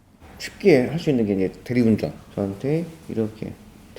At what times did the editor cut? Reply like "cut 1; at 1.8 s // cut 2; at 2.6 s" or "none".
cut 1; at 2.3 s